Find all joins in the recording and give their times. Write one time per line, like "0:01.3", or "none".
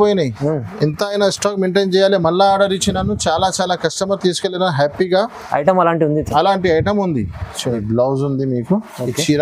0:07.8

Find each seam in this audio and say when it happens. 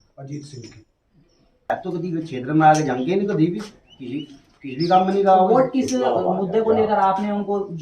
0:01.7

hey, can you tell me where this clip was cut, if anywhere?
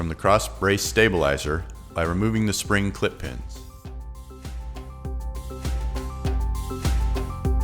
0:03.4

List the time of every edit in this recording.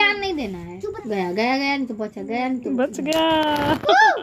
0:00.9

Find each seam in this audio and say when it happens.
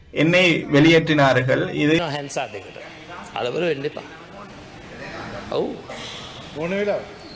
0:02.0

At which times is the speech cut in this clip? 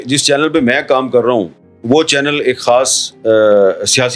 none

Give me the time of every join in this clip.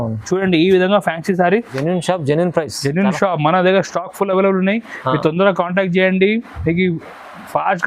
0:01.7

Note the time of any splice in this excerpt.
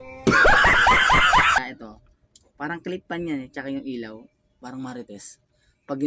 0:01.6
0:04.6

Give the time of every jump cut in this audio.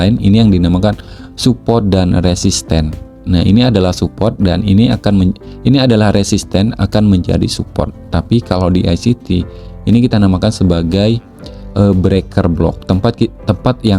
none

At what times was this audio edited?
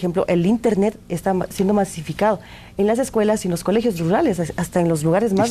0:04.0

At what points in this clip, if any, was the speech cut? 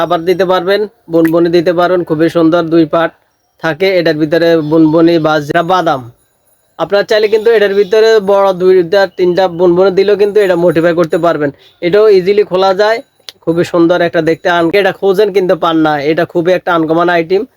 0:05.5
0:14.7

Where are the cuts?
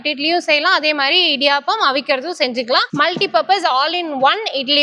0:02.9

